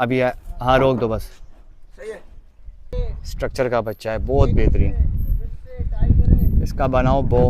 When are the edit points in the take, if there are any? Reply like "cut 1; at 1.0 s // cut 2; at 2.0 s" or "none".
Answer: cut 1; at 2.9 s